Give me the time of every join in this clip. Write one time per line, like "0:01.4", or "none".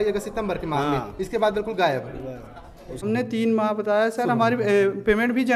0:02.9